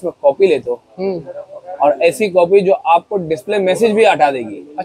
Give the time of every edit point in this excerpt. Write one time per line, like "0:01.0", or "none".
none